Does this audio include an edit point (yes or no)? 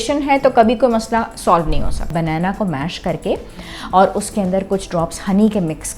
yes